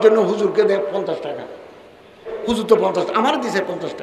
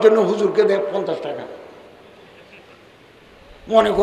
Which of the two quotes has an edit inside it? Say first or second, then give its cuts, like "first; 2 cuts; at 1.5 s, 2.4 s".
first; 1 cut; at 2.3 s